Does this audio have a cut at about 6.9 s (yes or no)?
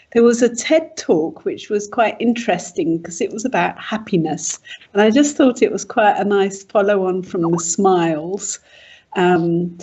no